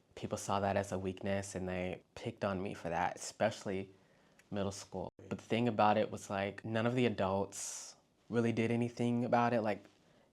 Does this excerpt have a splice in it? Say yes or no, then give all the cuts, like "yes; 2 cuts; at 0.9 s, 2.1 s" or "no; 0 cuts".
yes; 3 cuts; at 2.0 s, 5.1 s, 6.6 s